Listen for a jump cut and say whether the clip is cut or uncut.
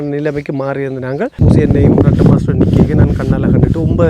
cut